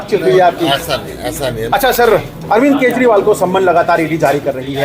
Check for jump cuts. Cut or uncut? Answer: cut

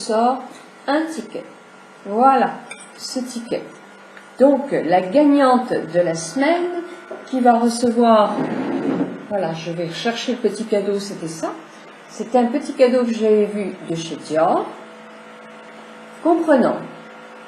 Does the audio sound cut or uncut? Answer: cut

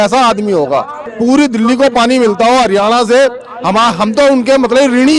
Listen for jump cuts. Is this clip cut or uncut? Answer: cut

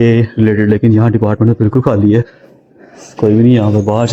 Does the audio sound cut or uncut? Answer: uncut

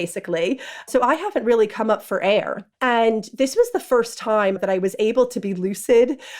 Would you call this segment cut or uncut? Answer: cut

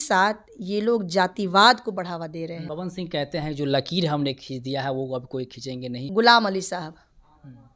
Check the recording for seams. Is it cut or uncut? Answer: cut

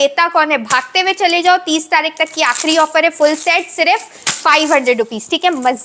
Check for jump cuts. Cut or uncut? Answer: uncut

